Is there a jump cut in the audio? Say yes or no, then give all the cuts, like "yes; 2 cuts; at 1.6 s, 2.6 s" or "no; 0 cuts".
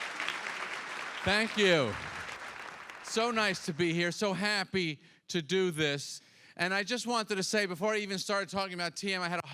yes; 1 cut; at 5.5 s